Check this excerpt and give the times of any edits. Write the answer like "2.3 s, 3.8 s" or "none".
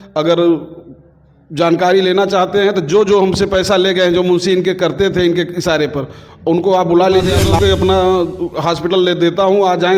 7.4 s